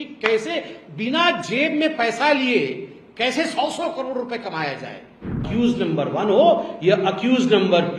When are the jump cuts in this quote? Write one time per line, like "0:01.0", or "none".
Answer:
0:05.4